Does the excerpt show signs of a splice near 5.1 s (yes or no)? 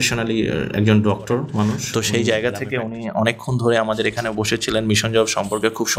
no